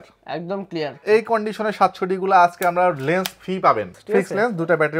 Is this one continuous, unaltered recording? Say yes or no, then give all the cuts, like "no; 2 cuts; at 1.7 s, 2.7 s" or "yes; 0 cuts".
no; 2 cuts; at 1.0 s, 4.0 s